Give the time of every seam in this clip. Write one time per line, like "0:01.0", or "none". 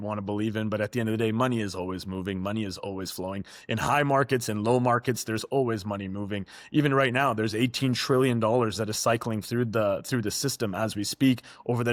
none

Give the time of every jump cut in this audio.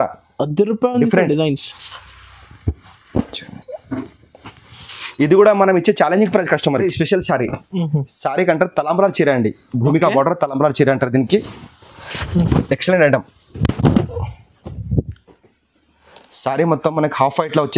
0:06.8

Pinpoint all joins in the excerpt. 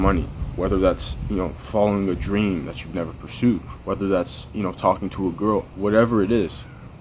none

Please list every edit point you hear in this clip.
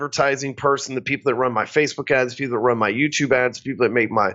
none

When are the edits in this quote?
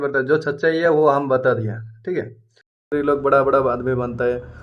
0:02.8

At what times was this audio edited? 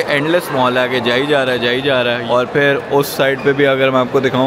none

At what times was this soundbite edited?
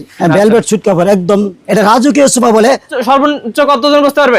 0:01.6
0:03.0

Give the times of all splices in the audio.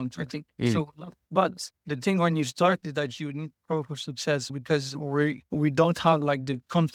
none

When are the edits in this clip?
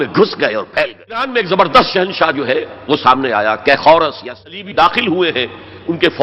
0:01.3
0:04.4

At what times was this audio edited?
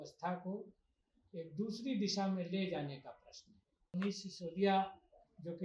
0:03.9

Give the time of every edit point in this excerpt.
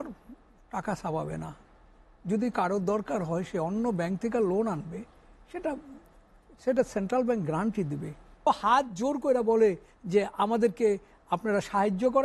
0:08.5

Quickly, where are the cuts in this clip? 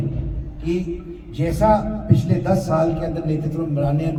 none

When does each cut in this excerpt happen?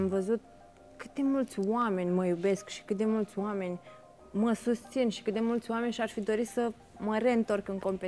none

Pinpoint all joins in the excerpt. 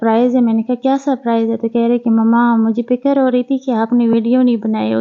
none

